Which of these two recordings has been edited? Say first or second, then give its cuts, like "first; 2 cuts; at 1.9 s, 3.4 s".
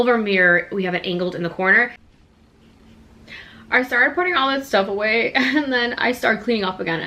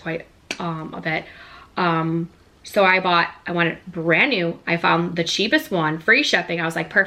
first; 1 cut; at 2.0 s